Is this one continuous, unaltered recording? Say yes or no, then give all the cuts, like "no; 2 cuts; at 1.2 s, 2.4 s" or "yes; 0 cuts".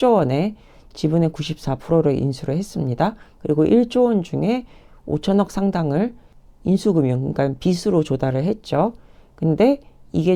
yes; 0 cuts